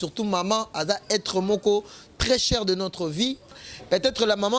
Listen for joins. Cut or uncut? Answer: cut